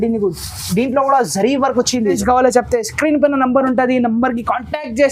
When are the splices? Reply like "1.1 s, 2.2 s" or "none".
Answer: 2.2 s